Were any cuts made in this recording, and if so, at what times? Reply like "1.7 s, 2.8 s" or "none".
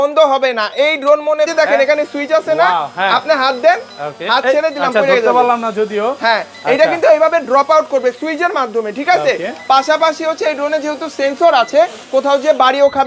1.5 s